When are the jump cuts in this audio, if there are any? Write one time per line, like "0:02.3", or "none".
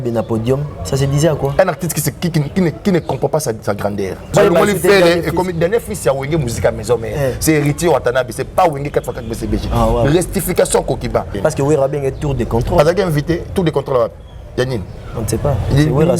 0:04.2
0:11.3